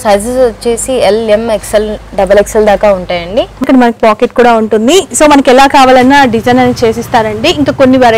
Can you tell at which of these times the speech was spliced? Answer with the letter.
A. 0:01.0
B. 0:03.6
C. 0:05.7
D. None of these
B